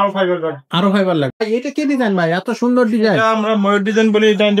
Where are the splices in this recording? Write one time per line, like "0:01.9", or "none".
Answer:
0:01.4